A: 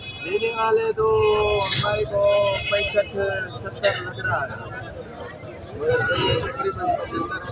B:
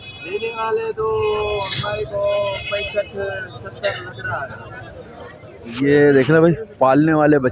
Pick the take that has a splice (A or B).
B